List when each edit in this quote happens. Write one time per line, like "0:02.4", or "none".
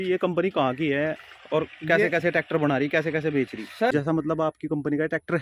0:03.9